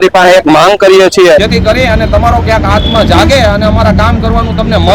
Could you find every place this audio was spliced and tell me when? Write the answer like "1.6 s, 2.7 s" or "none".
1.5 s